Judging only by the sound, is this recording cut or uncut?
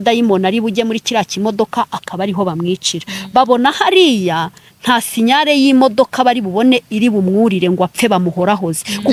uncut